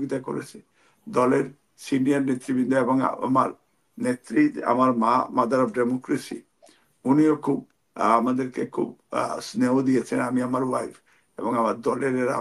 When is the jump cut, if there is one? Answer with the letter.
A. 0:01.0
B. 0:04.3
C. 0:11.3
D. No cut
D